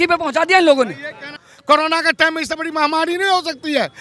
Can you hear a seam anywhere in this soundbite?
yes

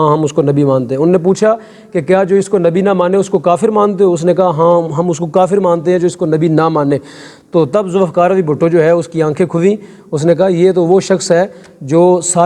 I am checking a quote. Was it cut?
no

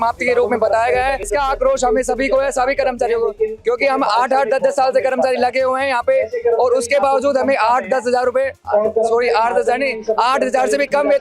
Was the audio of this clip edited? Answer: yes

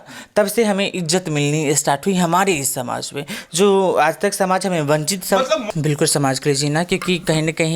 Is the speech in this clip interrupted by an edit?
yes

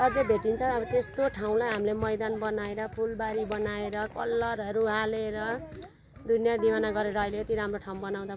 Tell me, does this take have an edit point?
no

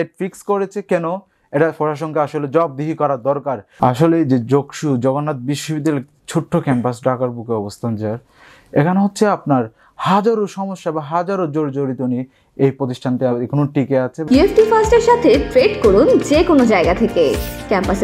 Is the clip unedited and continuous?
no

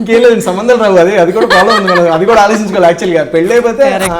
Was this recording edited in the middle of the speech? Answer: no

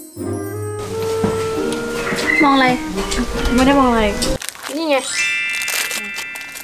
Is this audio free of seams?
no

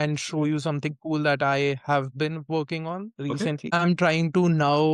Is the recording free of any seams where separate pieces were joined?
no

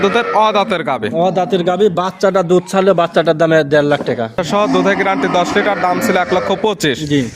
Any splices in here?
yes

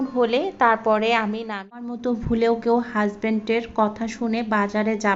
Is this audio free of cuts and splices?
no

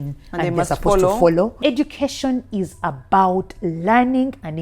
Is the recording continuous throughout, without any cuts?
no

